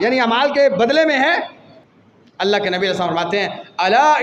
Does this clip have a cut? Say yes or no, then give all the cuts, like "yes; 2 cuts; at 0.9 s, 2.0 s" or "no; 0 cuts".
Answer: no; 0 cuts